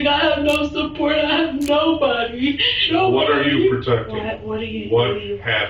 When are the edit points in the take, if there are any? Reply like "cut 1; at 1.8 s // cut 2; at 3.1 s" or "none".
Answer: cut 1; at 2.8 s